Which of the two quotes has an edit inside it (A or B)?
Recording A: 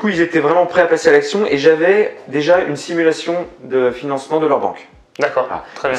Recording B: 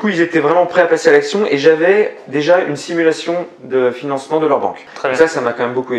B